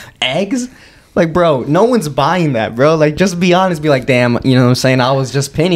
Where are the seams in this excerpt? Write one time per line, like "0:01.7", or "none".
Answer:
none